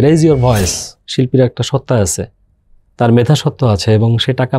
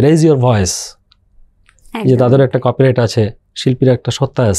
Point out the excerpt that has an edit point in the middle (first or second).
first